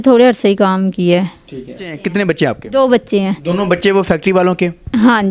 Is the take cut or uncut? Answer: cut